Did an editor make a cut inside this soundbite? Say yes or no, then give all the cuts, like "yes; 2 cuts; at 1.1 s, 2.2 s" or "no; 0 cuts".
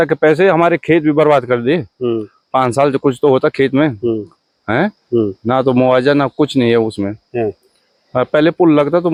no; 0 cuts